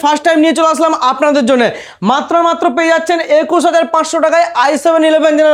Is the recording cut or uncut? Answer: uncut